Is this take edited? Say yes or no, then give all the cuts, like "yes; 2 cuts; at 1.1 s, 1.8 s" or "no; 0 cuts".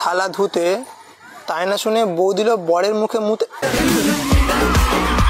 no; 0 cuts